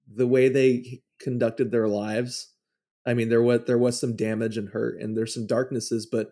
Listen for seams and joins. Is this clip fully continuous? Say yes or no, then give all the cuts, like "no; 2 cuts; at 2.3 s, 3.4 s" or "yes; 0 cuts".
yes; 0 cuts